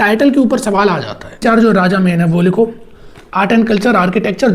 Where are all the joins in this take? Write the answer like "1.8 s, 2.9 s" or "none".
1.4 s